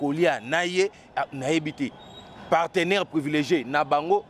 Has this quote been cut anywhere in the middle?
no; 0 cuts

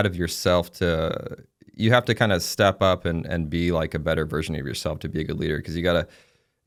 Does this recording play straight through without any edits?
yes; 0 cuts

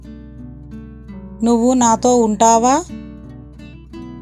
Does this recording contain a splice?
yes; 2 cuts; at 1.4 s, 2.9 s

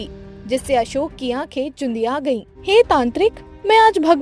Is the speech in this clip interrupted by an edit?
yes; 1 cut; at 2.5 s

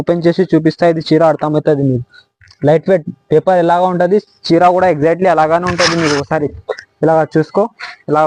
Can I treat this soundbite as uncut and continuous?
yes; 0 cuts

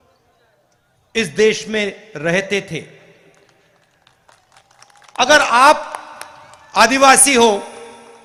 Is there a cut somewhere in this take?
no; 0 cuts

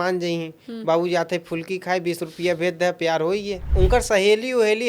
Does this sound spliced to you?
yes; 1 cut; at 3.6 s

